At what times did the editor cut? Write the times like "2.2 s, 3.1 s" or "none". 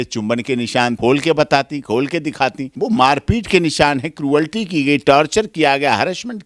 1.0 s, 2.7 s

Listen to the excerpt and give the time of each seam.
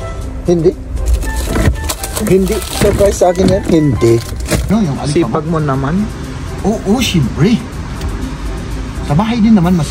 4.7 s

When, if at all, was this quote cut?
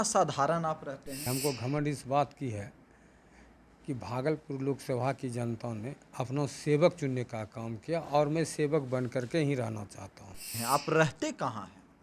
1.2 s, 10.5 s

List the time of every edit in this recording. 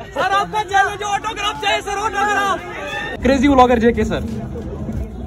3.2 s

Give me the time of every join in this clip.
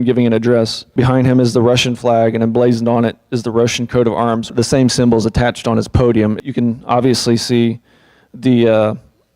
4.4 s

